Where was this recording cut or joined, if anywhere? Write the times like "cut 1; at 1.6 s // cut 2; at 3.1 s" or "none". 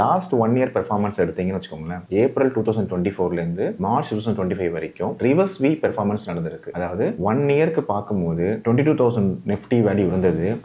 none